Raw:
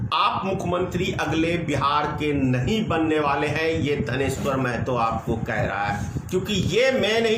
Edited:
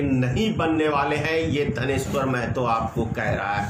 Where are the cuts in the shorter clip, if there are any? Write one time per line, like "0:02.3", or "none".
none